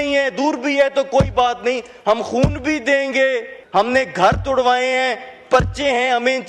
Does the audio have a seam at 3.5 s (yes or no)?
yes